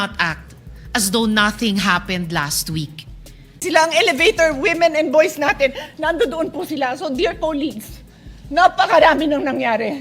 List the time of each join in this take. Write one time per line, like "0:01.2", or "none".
0:03.6